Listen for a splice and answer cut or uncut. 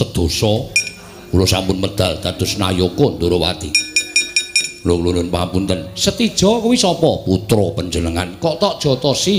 uncut